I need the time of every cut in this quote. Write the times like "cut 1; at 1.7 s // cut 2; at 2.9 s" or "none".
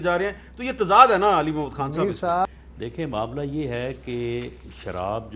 cut 1; at 2.5 s